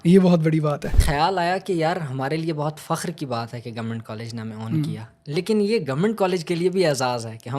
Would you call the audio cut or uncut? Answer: cut